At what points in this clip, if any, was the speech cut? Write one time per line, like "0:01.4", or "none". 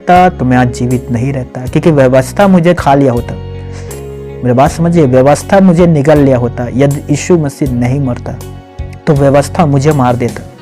0:02.8